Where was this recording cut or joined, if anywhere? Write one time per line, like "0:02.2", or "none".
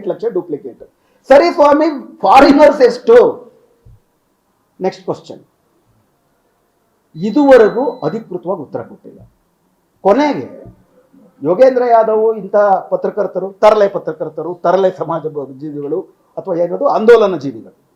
none